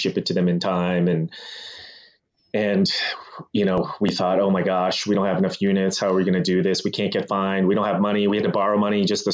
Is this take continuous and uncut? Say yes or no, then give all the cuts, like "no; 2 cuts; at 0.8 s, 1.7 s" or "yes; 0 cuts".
yes; 0 cuts